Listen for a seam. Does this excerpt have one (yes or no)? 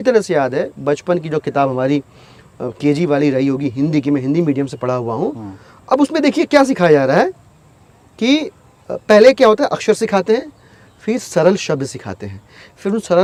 no